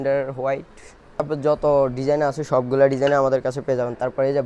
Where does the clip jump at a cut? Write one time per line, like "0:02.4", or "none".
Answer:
0:01.2